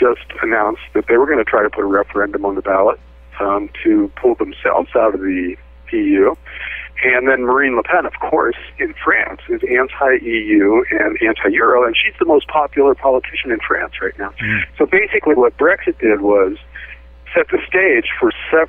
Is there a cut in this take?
no; 0 cuts

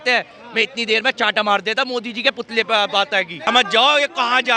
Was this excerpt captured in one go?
no; 1 cut; at 3.5 s

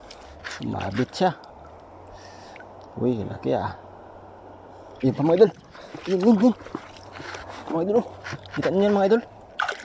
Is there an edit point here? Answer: yes; 1 cut; at 4.9 s

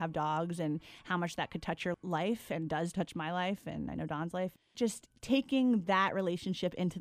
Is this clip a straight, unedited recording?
no; 3 cuts; at 2.0 s, 2.9 s, 4.7 s

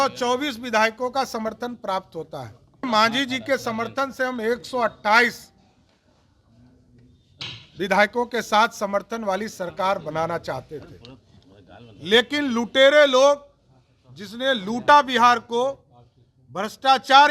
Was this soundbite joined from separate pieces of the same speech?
yes; 1 cut; at 2.9 s

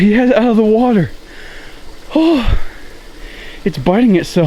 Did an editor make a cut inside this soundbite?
no; 0 cuts

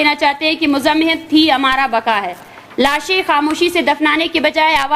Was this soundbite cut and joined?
no; 0 cuts

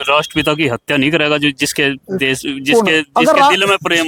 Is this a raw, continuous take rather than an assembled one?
yes; 0 cuts

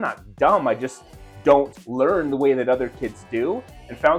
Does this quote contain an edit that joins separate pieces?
no; 0 cuts

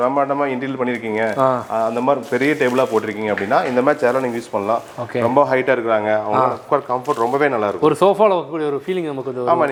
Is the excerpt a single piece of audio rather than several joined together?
yes; 0 cuts

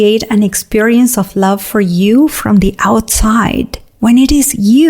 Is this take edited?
yes; 1 cut; at 3.8 s

